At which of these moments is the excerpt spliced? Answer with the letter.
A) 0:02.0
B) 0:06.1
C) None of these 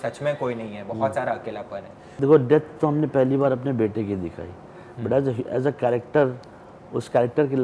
A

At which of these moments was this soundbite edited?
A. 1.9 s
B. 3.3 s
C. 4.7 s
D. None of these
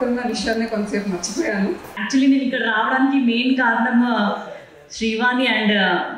A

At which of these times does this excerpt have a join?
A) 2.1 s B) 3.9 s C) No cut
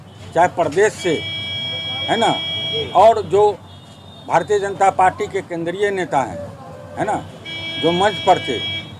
C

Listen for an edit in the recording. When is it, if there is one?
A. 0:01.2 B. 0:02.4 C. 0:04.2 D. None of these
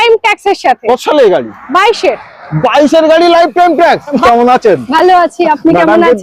C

